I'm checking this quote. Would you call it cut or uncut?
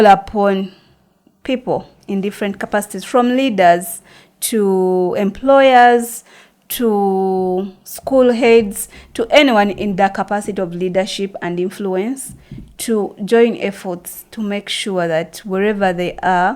uncut